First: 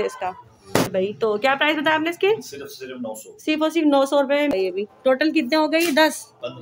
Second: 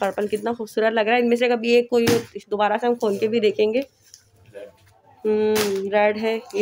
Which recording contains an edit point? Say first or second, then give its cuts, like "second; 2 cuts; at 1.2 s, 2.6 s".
first; 2 cuts; at 0.9 s, 4.5 s